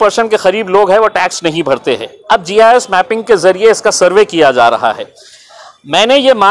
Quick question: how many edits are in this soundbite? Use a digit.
0